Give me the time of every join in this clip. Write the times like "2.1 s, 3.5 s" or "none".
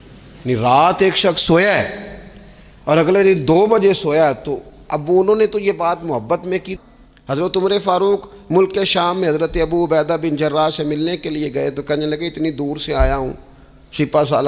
6.7 s